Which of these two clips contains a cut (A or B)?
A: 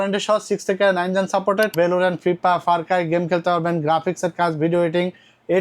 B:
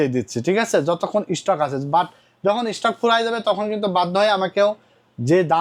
A